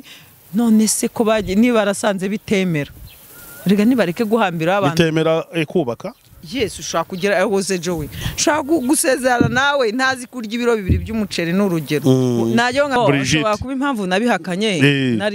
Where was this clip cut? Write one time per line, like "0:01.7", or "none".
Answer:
0:13.0

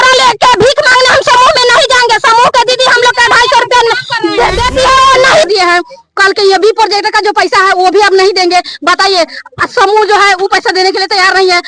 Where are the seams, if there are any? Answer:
0:05.5

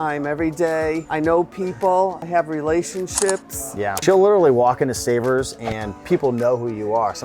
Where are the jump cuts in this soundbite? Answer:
0:01.0
0:02.2
0:04.0

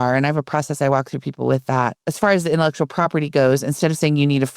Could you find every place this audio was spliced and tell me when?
0:02.0

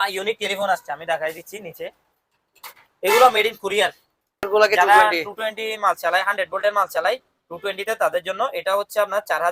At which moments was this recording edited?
0:04.5

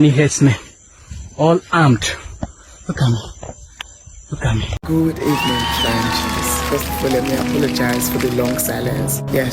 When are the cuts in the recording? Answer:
0:04.7

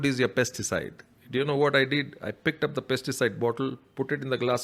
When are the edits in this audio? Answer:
none

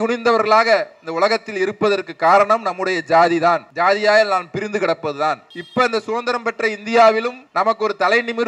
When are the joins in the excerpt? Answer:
0:03.7
0:05.5
0:07.4

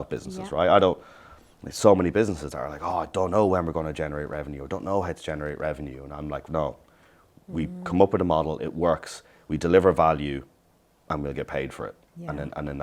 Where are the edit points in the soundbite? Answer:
none

